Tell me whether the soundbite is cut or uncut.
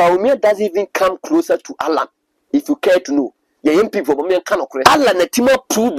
cut